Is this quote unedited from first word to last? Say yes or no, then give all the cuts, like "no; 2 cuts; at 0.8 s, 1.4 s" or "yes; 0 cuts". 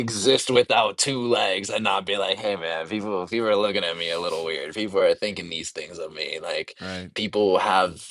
yes; 0 cuts